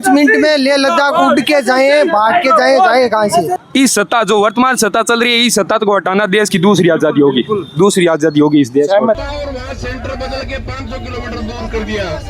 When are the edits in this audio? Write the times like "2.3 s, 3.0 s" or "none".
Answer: 3.6 s, 9.2 s